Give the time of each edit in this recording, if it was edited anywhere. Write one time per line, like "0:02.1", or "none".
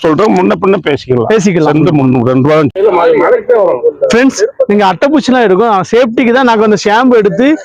0:02.7

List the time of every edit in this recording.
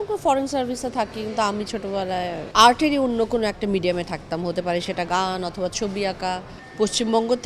0:02.4
0:06.6

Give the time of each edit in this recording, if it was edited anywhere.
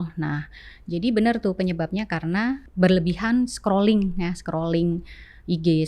0:02.7

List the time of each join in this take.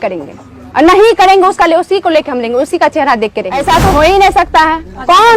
0:03.6

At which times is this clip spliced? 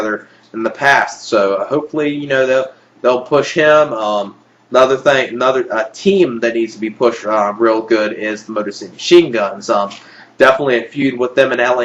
0:02.2

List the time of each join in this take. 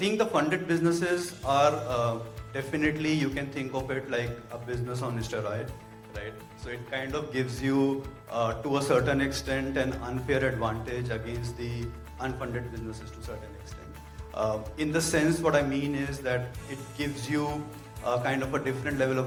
none

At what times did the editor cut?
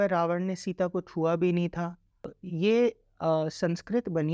0:02.4

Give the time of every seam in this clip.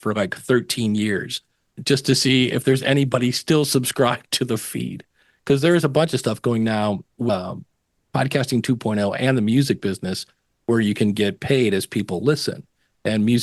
0:01.7
0:07.3

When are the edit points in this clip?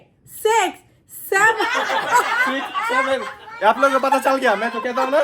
0:02.8

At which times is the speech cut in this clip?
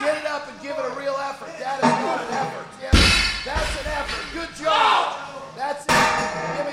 0:02.8

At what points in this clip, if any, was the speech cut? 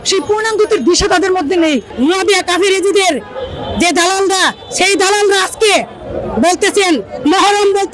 0:01.9

